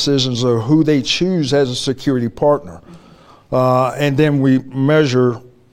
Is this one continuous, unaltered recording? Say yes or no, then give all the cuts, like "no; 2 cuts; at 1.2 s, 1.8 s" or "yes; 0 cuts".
yes; 0 cuts